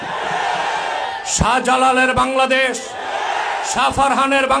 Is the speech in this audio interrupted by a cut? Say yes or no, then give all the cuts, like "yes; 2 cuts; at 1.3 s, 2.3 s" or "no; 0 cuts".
no; 0 cuts